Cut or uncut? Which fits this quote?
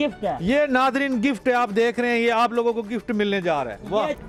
uncut